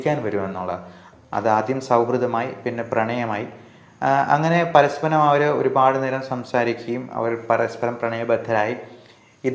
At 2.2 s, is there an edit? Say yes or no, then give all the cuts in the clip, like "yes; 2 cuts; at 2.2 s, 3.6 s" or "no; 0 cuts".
no; 1 cut; at 1.0 s